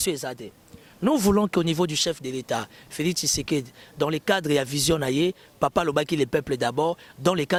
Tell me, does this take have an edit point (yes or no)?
no